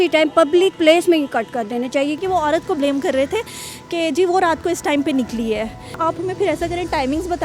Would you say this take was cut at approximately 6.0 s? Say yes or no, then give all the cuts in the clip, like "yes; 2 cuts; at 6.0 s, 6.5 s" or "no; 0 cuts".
yes; 2 cuts; at 2.2 s, 6.0 s